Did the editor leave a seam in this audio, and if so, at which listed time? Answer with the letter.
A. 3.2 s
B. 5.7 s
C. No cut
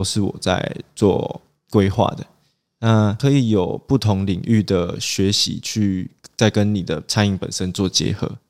A